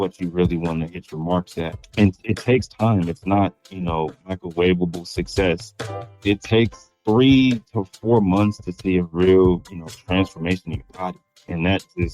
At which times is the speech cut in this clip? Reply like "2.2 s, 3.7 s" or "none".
6.1 s